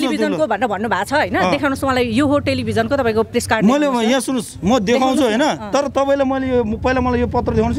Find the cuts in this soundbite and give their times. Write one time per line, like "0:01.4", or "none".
none